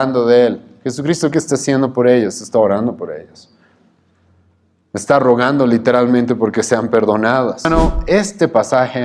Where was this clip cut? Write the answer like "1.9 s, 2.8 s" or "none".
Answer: 7.6 s

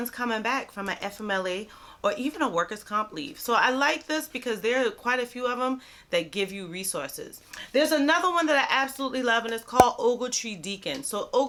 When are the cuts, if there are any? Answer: none

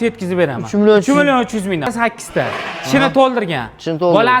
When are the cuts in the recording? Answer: 1.9 s

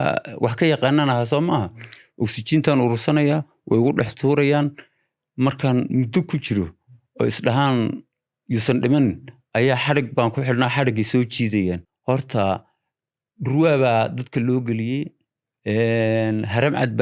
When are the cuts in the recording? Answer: 11.9 s

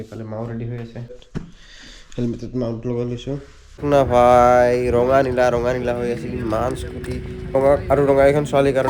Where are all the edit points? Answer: 1.2 s, 3.8 s

